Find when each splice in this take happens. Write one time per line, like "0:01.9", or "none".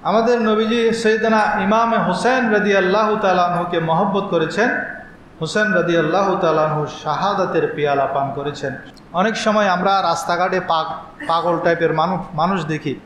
0:08.8